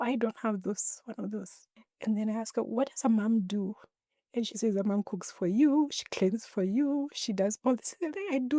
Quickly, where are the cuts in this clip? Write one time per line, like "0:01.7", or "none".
none